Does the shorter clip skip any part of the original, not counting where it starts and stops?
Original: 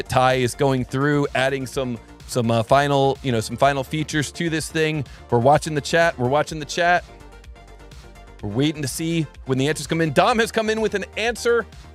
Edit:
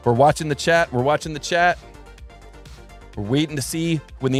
no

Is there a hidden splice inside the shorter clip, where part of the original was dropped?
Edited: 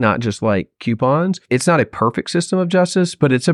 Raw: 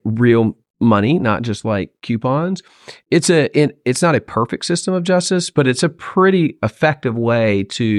yes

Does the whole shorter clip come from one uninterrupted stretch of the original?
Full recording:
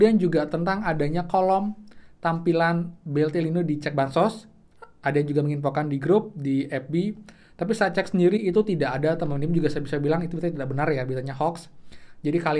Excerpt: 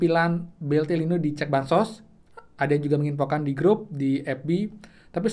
yes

